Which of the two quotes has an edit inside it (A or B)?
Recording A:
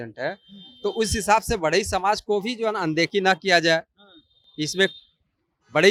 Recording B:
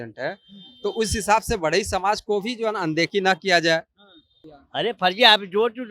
B